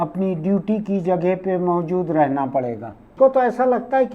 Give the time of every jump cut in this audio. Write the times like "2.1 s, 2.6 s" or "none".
3.1 s